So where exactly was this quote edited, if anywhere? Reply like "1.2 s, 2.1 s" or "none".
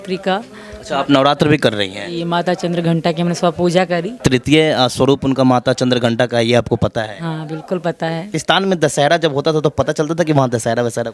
4.2 s, 8.4 s